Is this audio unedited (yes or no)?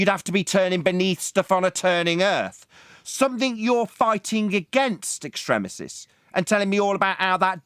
yes